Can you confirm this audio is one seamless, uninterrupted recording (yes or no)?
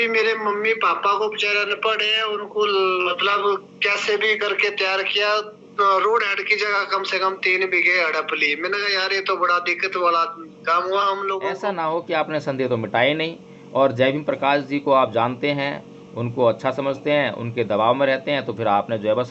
no